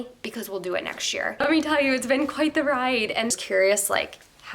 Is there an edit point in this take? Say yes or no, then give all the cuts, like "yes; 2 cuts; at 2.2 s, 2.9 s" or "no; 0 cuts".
yes; 2 cuts; at 1.4 s, 3.3 s